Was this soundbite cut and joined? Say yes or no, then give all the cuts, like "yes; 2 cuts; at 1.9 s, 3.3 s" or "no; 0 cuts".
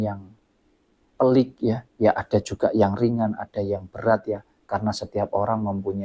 no; 0 cuts